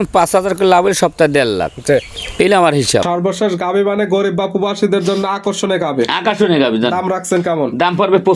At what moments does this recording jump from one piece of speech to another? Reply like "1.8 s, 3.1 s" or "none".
3.0 s